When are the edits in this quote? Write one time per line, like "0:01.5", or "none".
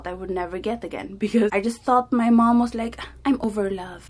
0:01.5
0:03.4

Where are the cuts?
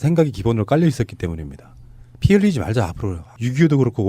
0:01.1

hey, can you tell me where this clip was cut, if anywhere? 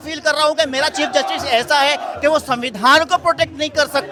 none

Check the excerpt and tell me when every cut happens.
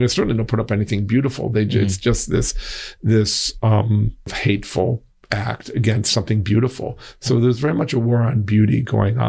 0:04.4
0:05.1

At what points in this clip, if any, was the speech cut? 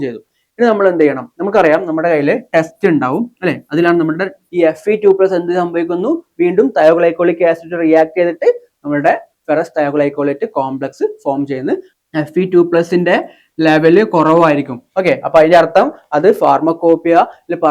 0:04.4
0:11.9

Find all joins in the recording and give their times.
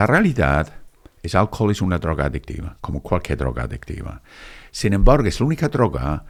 none

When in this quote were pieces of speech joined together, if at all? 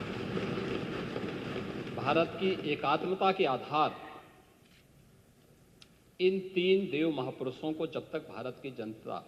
none

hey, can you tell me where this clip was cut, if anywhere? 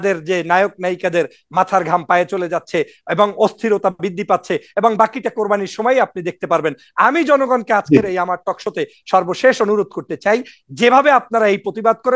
none

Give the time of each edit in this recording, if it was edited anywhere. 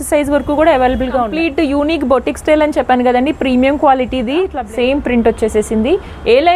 0:01.3
0:04.6

